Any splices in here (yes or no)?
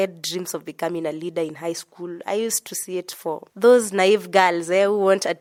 no